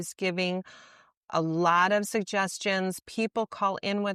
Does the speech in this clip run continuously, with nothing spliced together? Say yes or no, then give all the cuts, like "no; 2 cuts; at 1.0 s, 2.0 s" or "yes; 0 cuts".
yes; 0 cuts